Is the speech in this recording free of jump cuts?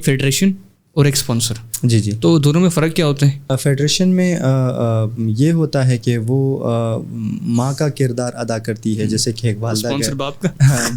no; 1 cut; at 3.6 s

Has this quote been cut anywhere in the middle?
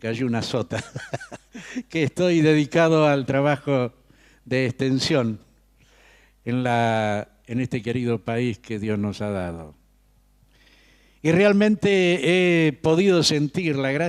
yes; 1 cut; at 12.2 s

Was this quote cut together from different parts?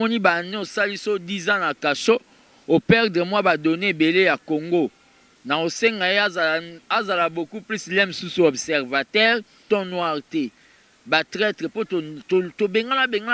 yes; 1 cut; at 9.6 s

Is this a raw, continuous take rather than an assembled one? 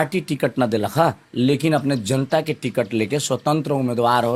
yes; 0 cuts

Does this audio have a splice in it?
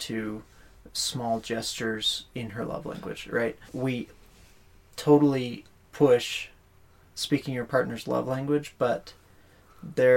yes; 1 cut; at 3.6 s

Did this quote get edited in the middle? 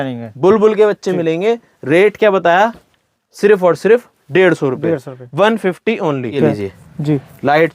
yes; 1 cut; at 6.4 s

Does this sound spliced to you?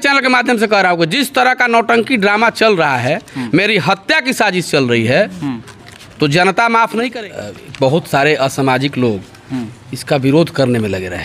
yes; 1 cut; at 7.1 s

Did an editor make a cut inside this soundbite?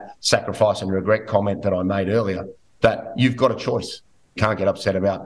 yes; 1 cut; at 4.3 s

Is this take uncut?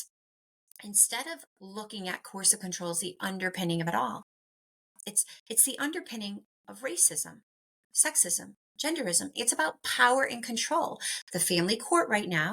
no; 1 cut; at 9.3 s

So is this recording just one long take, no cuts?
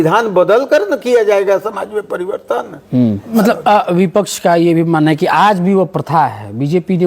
no; 1 cut; at 3.3 s

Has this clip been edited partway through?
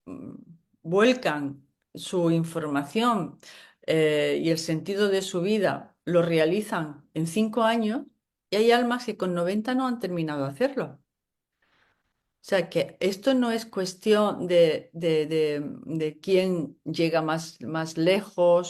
no; 0 cuts

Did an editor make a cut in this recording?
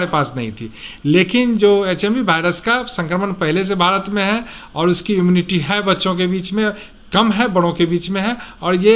no; 0 cuts

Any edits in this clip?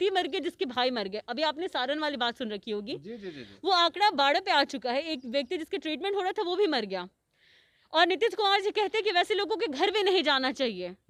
no; 0 cuts

